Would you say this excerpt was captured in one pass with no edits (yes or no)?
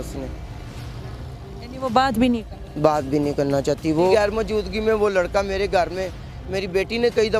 no